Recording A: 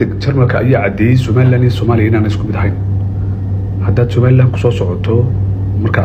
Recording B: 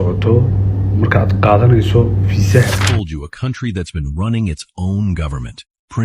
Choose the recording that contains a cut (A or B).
B